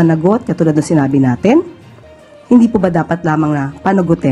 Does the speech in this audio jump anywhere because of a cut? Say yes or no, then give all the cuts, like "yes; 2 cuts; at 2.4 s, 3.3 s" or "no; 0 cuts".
no; 0 cuts